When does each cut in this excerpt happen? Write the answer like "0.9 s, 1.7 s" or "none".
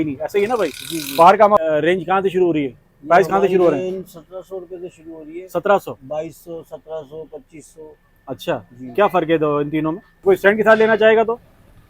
1.6 s, 10.1 s